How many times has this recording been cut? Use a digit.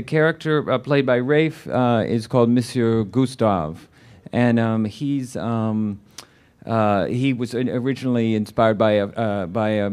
1